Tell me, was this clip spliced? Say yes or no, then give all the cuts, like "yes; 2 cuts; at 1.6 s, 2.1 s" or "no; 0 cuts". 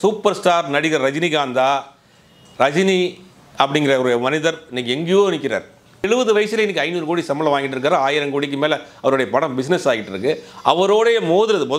yes; 1 cut; at 6.1 s